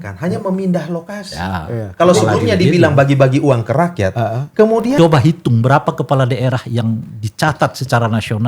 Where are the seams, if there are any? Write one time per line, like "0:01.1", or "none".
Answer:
0:05.0